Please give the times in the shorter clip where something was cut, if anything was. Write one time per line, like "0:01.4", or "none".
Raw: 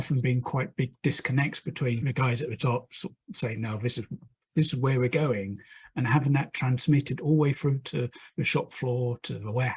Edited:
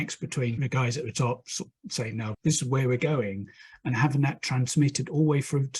0:02.3